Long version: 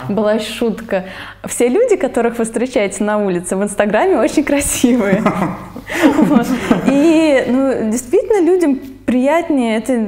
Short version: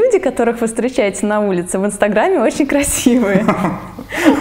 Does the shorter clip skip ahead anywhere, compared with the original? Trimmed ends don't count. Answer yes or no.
no